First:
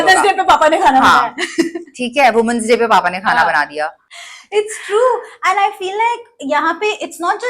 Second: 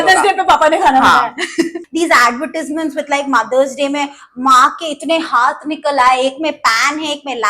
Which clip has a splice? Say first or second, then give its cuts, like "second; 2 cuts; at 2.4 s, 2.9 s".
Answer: second; 1 cut; at 1.8 s